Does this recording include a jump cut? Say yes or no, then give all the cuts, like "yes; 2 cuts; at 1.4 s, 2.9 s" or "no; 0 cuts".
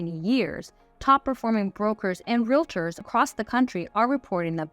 yes; 1 cut; at 3.0 s